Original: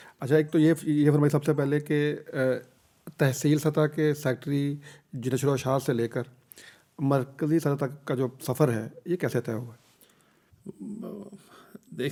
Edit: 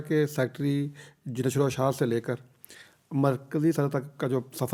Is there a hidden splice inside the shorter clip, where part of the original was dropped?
no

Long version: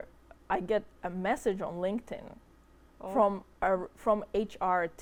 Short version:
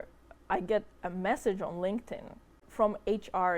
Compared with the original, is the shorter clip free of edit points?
no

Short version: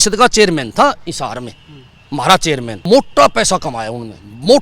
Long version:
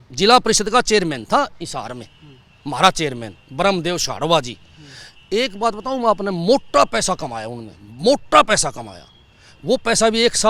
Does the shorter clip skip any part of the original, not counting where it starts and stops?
yes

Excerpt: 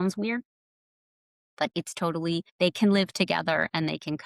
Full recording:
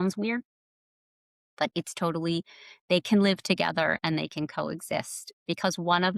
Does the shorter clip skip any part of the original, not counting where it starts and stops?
yes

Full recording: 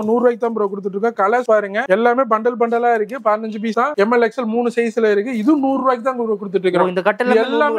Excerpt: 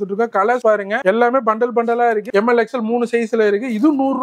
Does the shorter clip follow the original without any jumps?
no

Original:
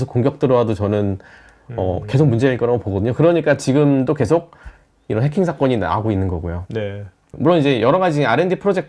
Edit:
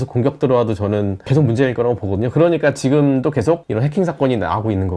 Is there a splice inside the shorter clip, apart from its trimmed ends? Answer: yes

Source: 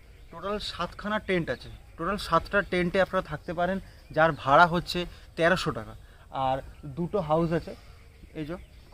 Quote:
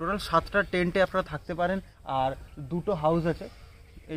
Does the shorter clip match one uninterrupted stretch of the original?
no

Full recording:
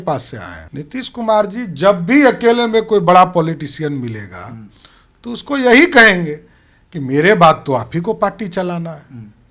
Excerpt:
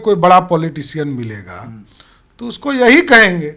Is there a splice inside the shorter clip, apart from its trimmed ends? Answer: no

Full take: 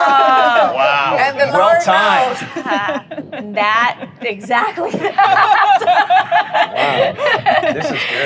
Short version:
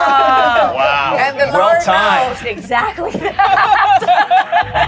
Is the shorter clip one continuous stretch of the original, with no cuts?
no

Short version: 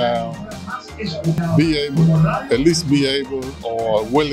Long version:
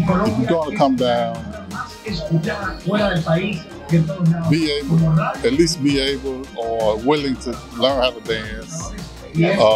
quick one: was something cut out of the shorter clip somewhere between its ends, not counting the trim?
yes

